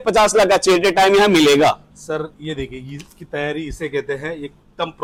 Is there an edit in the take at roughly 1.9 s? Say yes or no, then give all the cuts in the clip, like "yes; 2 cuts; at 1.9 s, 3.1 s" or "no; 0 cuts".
no; 0 cuts